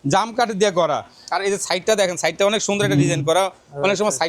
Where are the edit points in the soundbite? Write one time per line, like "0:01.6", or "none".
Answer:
0:01.1